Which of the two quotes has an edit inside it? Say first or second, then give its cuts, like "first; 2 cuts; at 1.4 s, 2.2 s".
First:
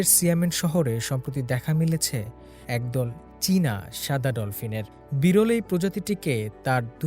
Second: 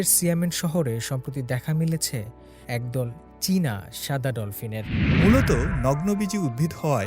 second; 1 cut; at 5.1 s